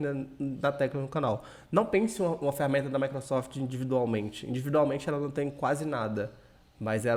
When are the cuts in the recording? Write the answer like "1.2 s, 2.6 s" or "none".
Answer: none